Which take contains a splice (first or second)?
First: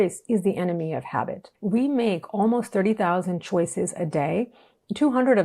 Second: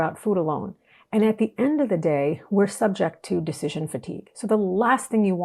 first